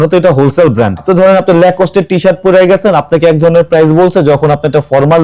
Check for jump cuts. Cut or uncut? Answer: cut